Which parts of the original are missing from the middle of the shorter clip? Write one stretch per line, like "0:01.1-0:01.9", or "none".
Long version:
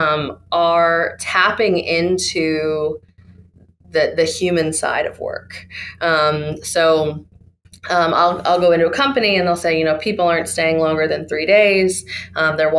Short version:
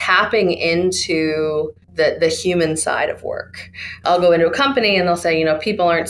0:03.1-0:03.8
0:06.0-0:08.4